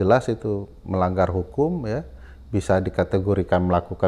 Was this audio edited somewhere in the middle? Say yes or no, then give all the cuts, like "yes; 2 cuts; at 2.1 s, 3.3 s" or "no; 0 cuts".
no; 0 cuts